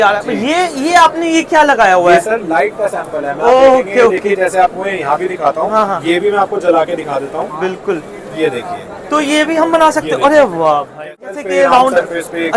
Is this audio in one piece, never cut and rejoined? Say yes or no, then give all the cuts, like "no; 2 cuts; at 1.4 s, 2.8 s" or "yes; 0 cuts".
no; 1 cut; at 11.2 s